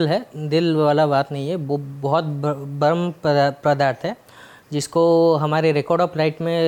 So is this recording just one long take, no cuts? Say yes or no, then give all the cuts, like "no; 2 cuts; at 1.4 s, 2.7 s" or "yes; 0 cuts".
yes; 0 cuts